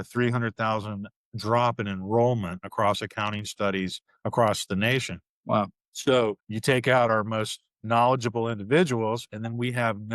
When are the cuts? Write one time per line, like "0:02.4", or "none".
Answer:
0:06.5